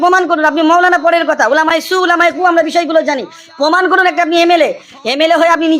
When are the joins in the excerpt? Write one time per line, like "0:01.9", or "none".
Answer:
none